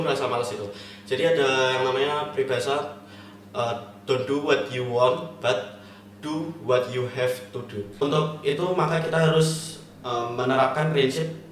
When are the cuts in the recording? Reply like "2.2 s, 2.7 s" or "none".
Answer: 7.8 s